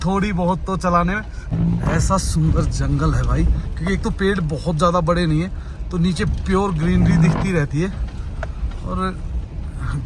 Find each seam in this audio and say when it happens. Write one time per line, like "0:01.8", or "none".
0:01.3